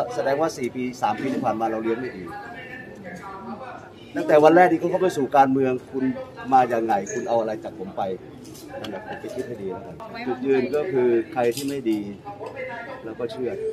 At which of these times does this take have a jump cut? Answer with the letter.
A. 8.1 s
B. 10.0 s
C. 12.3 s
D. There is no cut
B